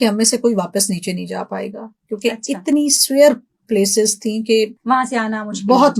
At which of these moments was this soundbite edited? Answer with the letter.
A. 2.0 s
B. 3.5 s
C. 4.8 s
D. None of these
C